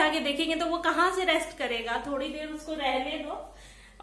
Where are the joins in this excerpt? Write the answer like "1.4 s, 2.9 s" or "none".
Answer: none